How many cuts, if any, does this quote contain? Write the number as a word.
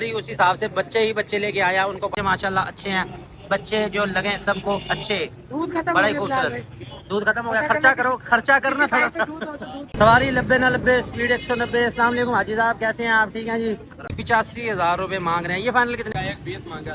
four